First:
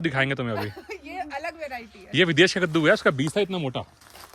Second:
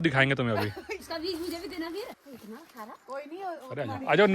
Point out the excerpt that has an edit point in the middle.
second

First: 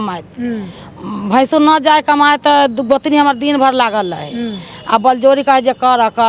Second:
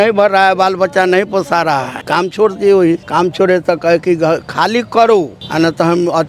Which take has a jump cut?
second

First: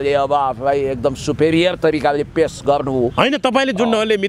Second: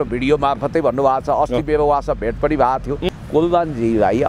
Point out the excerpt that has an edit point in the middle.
second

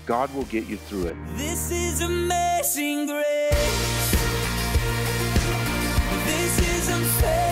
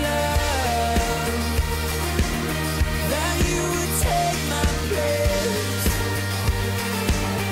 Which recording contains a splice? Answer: first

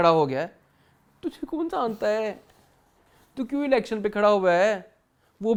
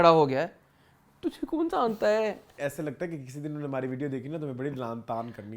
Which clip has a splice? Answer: second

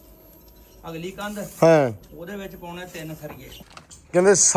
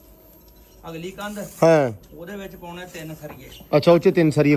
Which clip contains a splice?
first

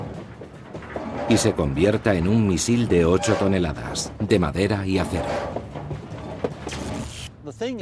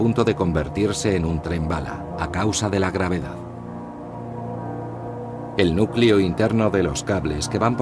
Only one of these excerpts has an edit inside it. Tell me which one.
first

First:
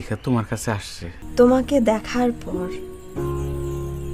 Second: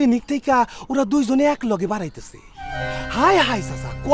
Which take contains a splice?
first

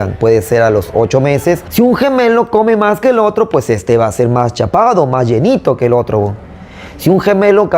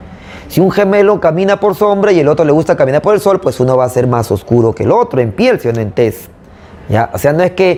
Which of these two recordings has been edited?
first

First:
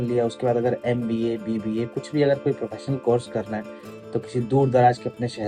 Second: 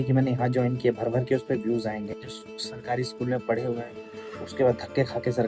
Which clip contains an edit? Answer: second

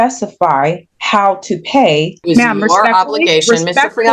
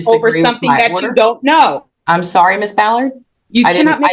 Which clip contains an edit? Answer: first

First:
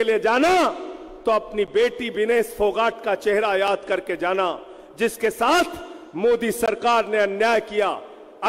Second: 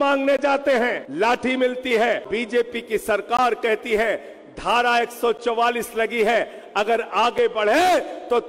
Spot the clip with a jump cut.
second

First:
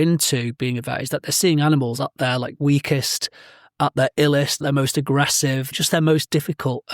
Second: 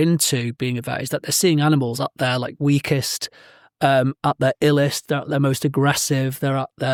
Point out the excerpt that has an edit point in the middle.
first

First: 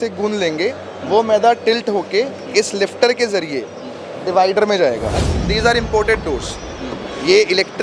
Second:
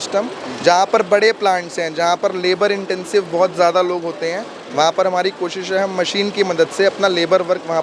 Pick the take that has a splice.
first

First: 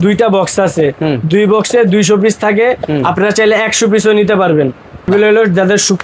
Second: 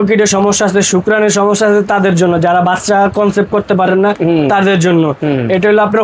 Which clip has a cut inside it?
first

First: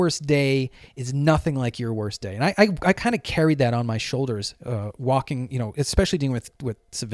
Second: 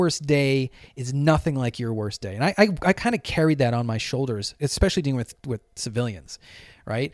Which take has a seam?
second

